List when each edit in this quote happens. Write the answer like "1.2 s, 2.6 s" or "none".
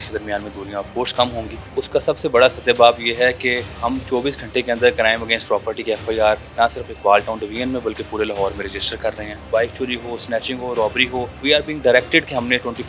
1.6 s, 3.7 s, 6.5 s, 9.4 s, 11.3 s